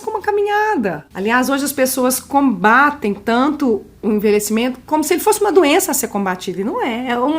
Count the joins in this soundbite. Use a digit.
2